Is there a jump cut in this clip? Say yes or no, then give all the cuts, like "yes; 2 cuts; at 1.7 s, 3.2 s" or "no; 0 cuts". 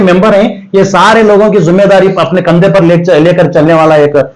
no; 0 cuts